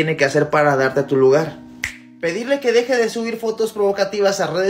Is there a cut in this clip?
no; 0 cuts

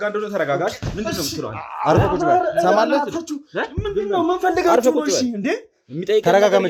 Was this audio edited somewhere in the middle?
no; 0 cuts

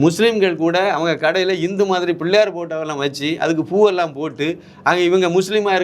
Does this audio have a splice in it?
no; 0 cuts

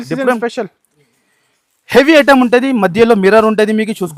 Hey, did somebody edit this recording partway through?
no; 0 cuts

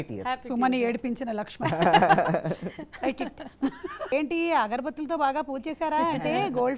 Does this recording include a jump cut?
yes; 1 cut; at 4.1 s

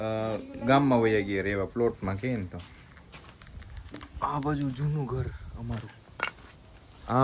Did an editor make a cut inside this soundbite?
no; 0 cuts

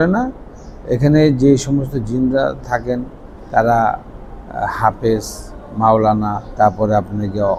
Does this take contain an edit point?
no; 0 cuts

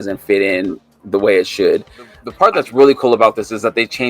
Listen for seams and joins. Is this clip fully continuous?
no; 1 cut; at 2.2 s

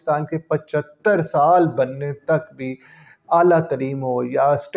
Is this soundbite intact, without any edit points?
yes; 0 cuts

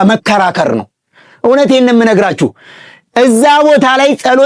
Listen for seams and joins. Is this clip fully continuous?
yes; 0 cuts

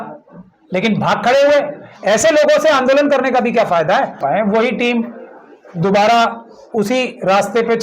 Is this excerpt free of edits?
no; 1 cut; at 4.2 s

